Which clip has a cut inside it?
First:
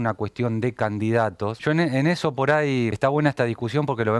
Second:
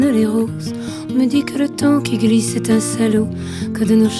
first; 2 cuts; at 1.6 s, 2.9 s

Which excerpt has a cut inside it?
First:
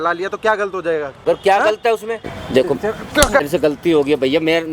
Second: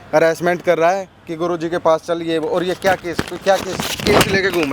first; 3 cuts; at 1.1 s, 2.3 s, 3.4 s

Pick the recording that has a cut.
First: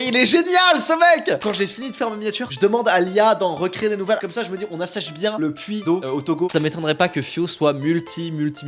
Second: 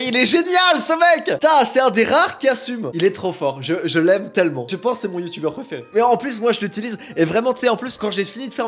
first; 3 cuts; at 1.4 s, 4.2 s, 6.5 s

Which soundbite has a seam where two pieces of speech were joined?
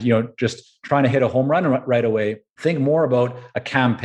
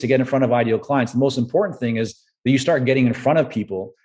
first; 1 cut; at 2.5 s

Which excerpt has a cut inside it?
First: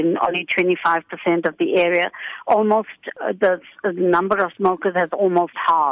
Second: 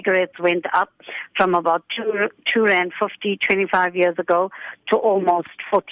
first; 2 cuts; at 3.1 s, 4.5 s

